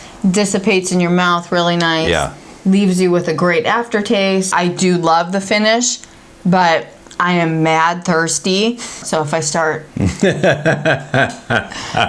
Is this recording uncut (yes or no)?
no